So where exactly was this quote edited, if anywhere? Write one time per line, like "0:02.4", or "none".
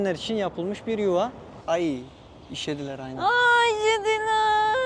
0:01.5

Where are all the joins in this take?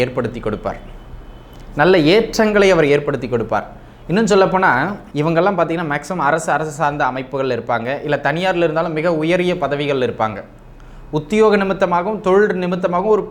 0:05.0

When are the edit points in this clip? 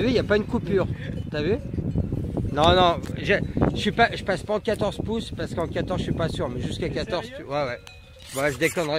0:05.3

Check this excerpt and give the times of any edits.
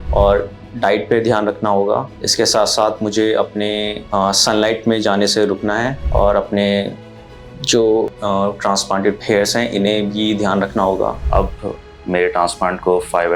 0:11.2

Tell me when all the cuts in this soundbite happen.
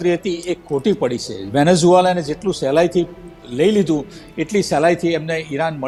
none

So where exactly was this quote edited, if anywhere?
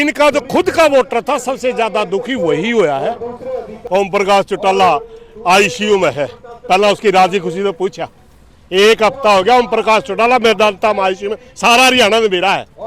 0:03.7

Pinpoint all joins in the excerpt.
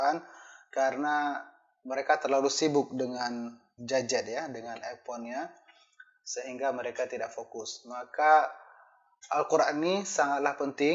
none

